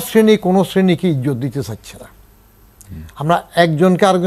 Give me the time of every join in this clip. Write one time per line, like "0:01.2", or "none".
none

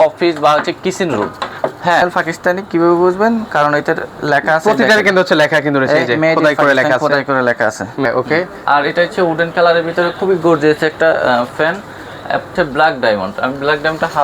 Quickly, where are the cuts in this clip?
0:02.0
0:08.1
0:12.5

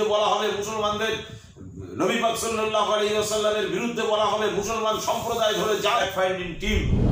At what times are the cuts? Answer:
0:06.0

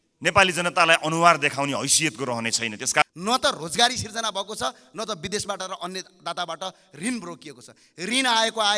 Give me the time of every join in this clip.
0:03.0

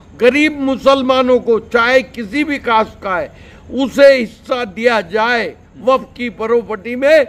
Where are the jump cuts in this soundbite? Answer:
none

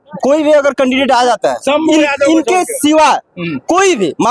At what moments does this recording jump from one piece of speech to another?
none

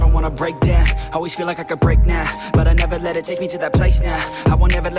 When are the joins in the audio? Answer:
none

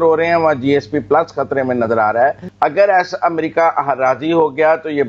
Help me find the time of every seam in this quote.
0:02.4

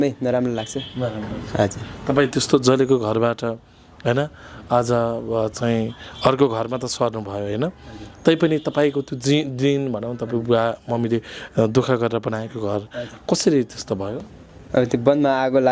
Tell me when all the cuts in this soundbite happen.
none

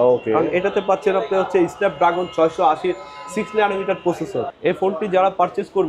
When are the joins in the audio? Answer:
0:04.5

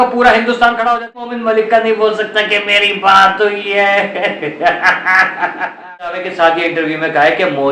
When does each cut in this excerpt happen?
0:01.3
0:06.3

